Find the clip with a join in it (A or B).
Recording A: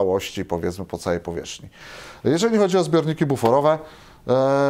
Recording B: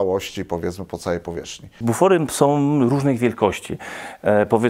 B